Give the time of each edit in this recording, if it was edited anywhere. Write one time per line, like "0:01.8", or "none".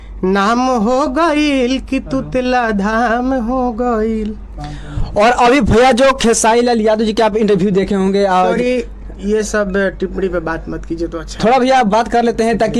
none